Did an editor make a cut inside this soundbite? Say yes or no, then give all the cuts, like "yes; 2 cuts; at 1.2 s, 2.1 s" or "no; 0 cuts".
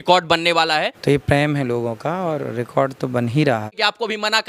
yes; 2 cuts; at 0.9 s, 3.7 s